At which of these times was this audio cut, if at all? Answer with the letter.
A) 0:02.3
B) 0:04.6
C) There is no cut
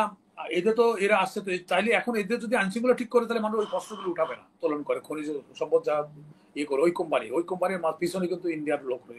B